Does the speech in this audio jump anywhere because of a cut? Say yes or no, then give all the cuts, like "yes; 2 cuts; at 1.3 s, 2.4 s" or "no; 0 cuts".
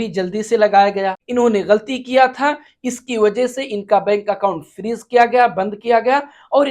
yes; 1 cut; at 1.2 s